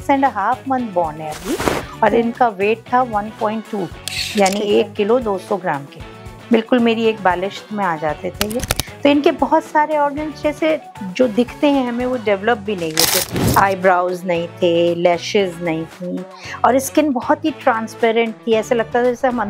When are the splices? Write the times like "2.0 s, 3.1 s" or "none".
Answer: none